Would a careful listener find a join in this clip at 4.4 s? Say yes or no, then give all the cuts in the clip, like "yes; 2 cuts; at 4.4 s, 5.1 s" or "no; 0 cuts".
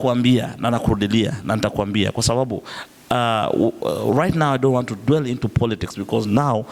no; 0 cuts